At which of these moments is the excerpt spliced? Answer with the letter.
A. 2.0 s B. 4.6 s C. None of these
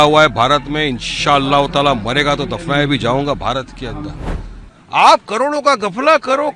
B